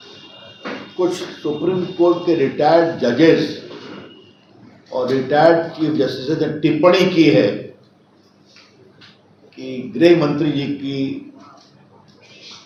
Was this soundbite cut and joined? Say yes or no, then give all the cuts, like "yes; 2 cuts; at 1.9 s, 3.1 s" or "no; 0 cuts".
no; 0 cuts